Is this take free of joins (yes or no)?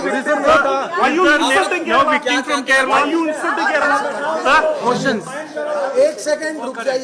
yes